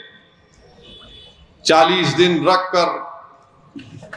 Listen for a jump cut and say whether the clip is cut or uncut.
uncut